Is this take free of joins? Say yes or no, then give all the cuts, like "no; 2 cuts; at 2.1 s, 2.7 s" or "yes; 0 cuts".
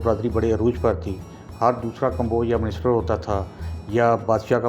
yes; 0 cuts